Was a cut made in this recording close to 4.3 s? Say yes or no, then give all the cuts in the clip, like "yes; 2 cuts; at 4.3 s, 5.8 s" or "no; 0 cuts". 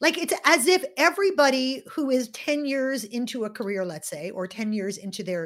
no; 0 cuts